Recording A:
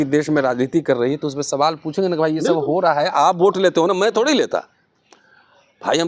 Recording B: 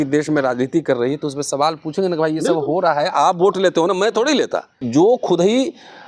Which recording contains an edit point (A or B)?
B